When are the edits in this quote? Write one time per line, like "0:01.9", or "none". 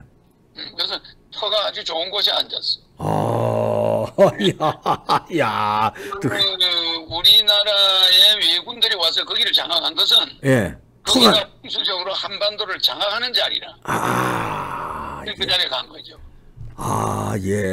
none